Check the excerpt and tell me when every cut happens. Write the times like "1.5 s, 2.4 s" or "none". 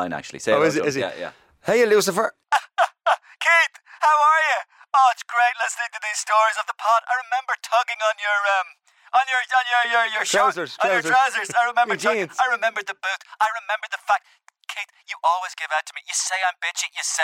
2.4 s